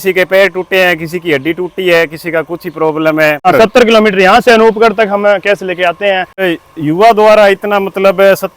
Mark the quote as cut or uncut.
cut